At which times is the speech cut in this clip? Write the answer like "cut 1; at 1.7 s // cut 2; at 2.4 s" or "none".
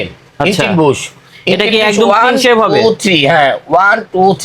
none